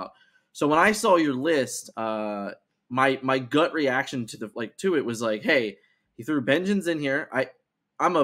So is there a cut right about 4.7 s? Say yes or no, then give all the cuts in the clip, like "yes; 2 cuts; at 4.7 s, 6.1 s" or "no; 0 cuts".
no; 0 cuts